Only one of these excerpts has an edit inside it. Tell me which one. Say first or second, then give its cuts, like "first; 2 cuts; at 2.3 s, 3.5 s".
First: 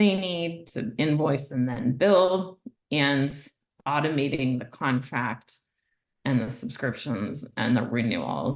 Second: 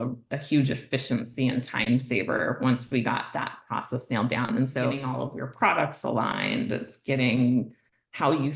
second; 1 cut; at 5.0 s